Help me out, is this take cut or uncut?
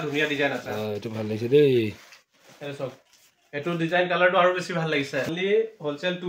cut